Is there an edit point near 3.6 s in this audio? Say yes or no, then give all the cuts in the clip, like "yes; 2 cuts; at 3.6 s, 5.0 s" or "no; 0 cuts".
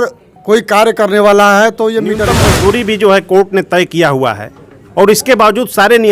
no; 1 cut; at 2.3 s